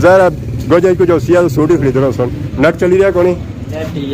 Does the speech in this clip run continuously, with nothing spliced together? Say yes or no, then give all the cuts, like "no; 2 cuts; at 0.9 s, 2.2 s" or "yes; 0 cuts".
no; 1 cut; at 2.4 s